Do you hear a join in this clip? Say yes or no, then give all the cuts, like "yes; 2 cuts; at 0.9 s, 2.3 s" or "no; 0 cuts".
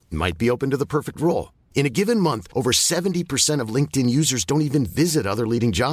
no; 0 cuts